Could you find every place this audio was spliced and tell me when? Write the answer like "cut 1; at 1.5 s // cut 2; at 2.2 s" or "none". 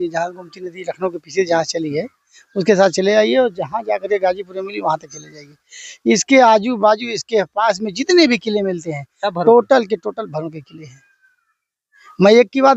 none